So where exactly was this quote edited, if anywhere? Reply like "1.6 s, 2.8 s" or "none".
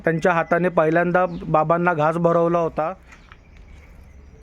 3.1 s